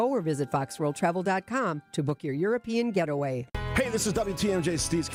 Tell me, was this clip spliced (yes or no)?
no